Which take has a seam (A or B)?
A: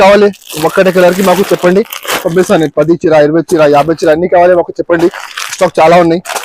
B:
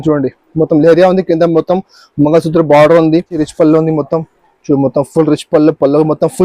B